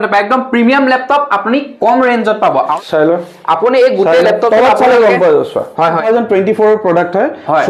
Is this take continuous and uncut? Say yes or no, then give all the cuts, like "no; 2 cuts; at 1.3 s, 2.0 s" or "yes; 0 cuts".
no; 2 cuts; at 2.7 s, 6.0 s